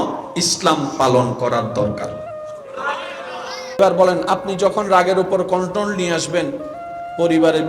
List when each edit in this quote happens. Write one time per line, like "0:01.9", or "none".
0:03.8